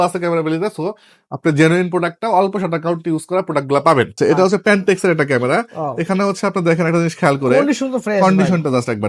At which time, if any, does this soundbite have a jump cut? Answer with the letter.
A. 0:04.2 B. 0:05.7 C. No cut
A